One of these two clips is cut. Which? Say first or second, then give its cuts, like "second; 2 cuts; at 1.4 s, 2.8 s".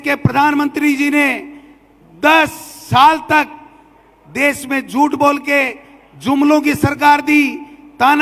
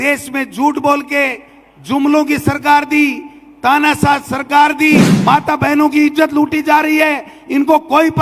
second; 1 cut; at 5.1 s